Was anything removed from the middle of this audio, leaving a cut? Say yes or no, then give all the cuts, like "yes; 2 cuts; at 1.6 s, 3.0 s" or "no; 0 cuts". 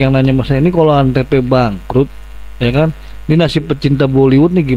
no; 0 cuts